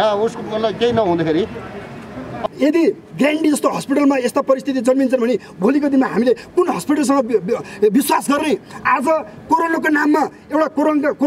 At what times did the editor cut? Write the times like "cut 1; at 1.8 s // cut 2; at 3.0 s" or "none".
cut 1; at 2.3 s